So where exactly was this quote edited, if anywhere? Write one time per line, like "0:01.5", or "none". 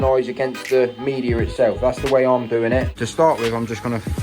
0:03.0